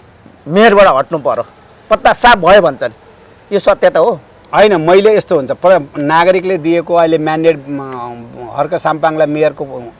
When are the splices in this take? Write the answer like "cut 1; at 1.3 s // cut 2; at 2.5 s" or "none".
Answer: none